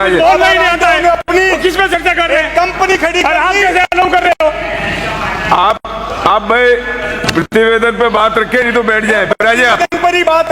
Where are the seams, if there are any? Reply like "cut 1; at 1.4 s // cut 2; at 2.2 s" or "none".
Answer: none